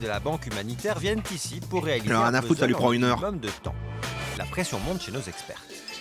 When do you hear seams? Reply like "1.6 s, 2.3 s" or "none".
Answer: none

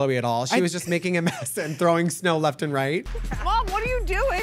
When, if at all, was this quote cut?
3.1 s

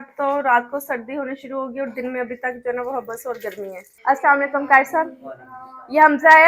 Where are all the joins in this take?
3.8 s

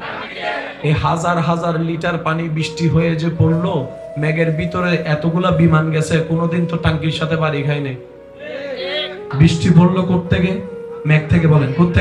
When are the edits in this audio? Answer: 9.2 s

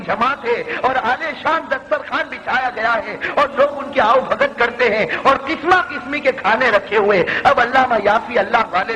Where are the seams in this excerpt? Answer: none

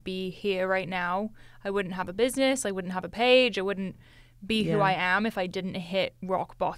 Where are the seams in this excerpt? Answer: none

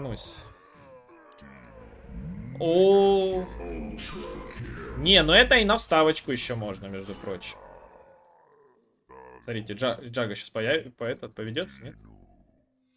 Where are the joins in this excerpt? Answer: none

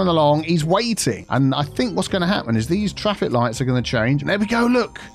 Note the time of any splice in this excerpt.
1.2 s, 4.2 s

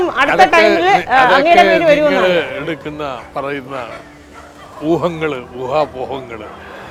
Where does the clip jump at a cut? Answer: none

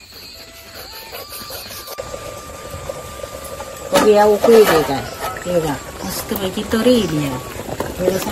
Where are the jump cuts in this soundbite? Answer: 1.9 s

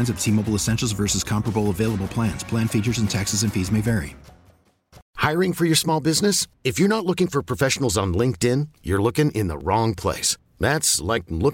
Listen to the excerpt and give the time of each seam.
5.0 s

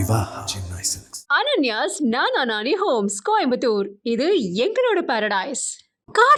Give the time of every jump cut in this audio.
none

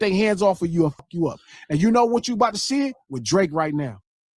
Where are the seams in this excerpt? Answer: 1.0 s

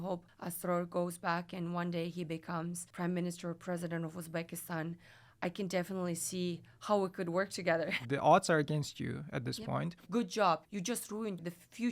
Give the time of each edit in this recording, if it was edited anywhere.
8.0 s, 10.0 s

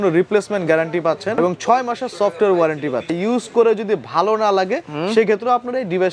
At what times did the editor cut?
1.4 s, 3.1 s

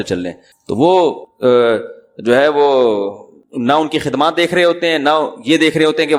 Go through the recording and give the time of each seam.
none

